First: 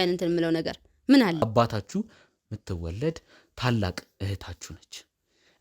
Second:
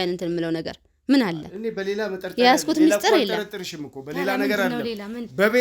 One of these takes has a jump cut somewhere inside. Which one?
first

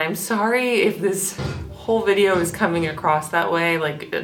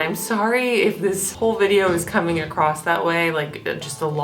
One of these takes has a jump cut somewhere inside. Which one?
second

